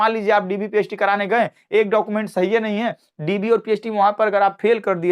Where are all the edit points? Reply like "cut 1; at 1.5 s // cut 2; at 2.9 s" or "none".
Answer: cut 1; at 3.1 s